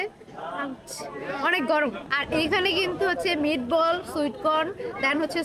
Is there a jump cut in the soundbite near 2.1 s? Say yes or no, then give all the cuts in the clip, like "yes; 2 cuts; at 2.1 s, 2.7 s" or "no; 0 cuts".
yes; 1 cut; at 2.1 s